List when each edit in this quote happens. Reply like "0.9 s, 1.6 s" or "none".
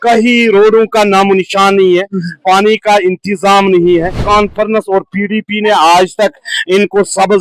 4.2 s